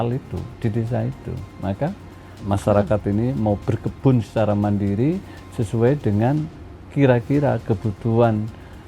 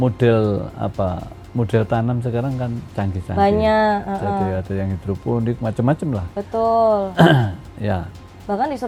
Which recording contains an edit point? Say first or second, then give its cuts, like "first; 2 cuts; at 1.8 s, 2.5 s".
first; 1 cut; at 2.3 s